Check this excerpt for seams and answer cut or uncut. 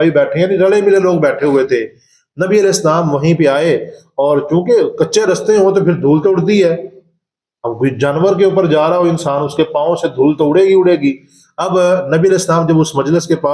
uncut